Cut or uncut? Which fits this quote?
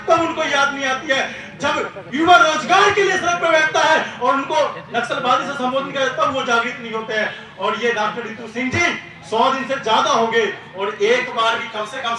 uncut